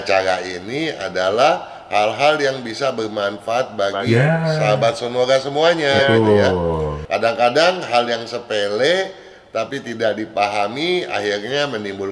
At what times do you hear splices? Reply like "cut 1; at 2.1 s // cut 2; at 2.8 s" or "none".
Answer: cut 1; at 7.0 s